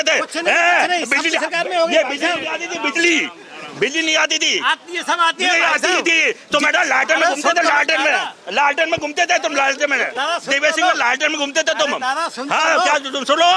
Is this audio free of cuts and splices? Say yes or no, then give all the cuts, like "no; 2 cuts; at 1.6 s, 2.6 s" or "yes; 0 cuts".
yes; 0 cuts